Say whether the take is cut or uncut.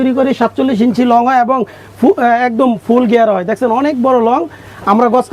uncut